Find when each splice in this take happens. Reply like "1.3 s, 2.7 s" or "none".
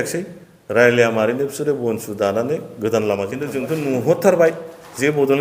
3.6 s